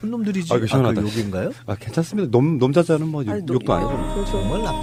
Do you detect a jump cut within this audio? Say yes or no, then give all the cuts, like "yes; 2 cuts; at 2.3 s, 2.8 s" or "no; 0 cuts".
no; 0 cuts